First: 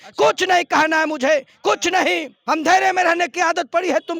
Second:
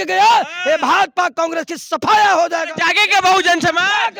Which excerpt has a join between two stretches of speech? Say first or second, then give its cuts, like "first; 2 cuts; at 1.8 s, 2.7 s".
first; 1 cut; at 2.3 s